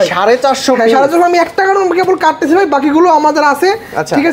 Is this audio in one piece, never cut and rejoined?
yes; 0 cuts

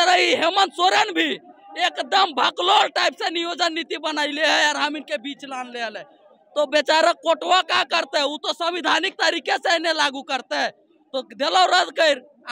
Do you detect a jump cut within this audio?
no; 0 cuts

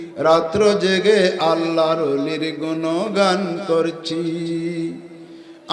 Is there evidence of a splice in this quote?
no; 0 cuts

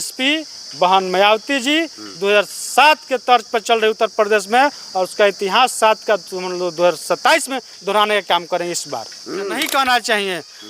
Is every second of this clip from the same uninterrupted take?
no; 1 cut; at 9.6 s

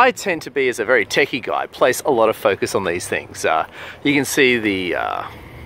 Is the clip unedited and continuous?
no; 1 cut; at 1.7 s

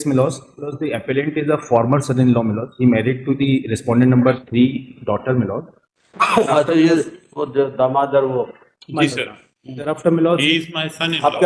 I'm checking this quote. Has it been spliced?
no; 0 cuts

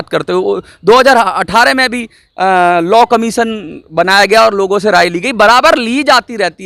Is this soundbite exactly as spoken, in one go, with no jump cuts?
yes; 0 cuts

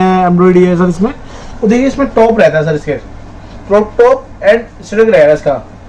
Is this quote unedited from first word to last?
yes; 0 cuts

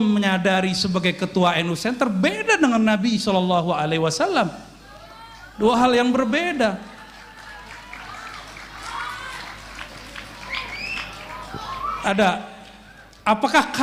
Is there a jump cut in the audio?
no; 0 cuts

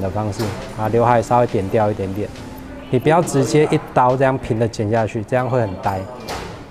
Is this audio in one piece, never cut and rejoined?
yes; 0 cuts

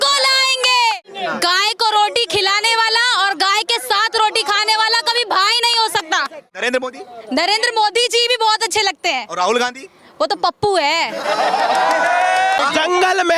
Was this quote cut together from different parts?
yes; 3 cuts; at 1.0 s, 6.6 s, 12.6 s

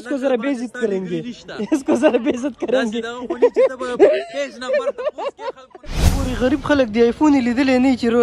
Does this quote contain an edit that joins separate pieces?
yes; 1 cut; at 6.0 s

